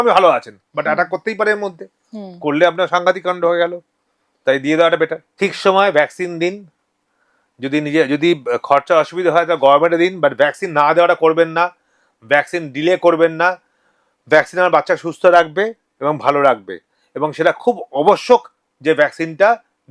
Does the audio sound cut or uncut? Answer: cut